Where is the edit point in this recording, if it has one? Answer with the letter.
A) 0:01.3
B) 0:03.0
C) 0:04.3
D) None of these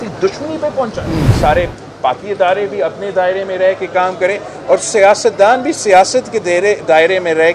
A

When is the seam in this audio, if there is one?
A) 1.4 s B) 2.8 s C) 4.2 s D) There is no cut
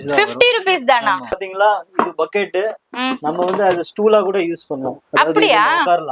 A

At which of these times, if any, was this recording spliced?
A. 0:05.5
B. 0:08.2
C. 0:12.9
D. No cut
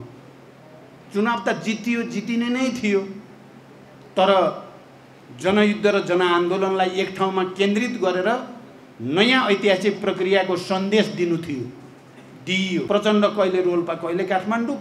C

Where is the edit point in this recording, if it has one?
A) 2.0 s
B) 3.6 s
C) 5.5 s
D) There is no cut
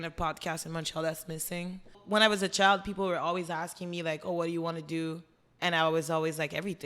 A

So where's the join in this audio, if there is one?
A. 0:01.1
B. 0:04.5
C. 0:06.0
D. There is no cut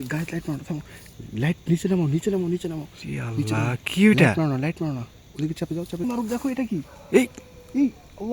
C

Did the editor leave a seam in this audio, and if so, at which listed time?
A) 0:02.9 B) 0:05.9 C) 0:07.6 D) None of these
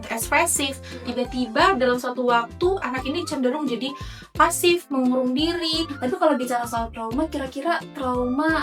B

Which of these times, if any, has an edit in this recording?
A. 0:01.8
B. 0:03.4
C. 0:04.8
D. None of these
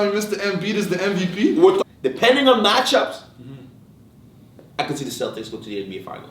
A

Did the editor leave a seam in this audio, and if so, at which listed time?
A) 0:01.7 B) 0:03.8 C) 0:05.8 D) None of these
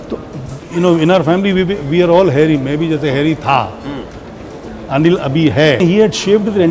C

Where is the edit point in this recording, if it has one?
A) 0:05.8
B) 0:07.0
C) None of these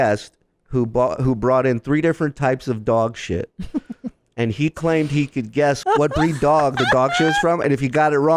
A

